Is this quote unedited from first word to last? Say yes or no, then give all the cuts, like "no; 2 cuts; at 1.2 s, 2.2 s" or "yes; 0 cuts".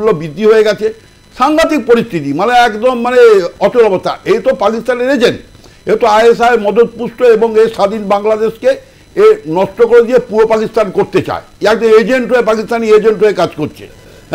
yes; 0 cuts